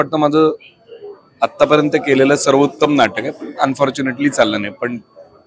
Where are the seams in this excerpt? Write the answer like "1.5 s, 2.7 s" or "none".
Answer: none

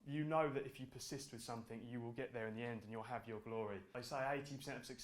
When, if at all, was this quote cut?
3.9 s

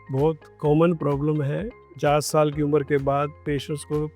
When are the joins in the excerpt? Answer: 1.8 s, 3.4 s

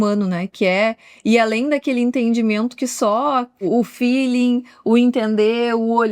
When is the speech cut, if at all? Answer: 3.7 s

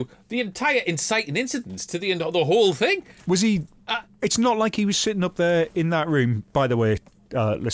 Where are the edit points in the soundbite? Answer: none

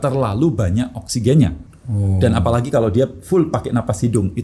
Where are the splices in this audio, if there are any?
1.7 s

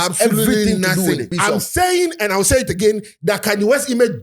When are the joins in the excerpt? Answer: 1.3 s

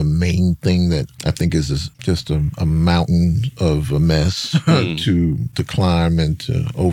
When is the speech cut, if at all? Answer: 1.1 s, 1.9 s, 5.5 s

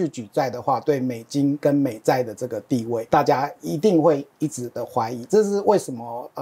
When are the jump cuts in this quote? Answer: 3.0 s

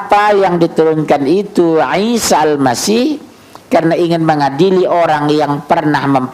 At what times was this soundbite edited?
none

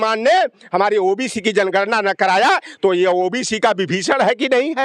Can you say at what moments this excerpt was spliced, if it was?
none

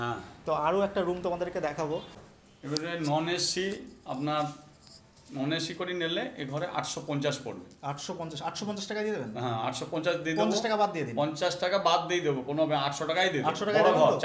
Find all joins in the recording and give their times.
2.2 s

